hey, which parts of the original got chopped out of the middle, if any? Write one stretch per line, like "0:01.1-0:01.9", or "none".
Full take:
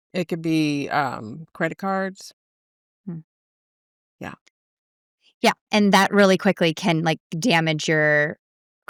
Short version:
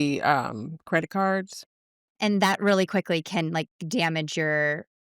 0:02.8-0:05.6